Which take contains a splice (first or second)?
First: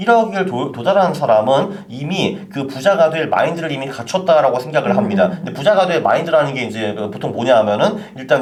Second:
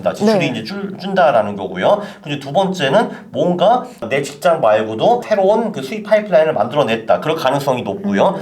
second